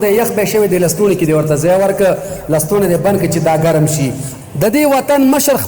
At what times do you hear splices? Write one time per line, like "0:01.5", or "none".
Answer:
0:04.3